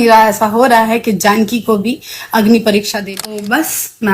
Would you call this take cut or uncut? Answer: cut